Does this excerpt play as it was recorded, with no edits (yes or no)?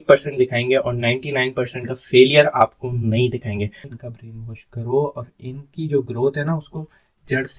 no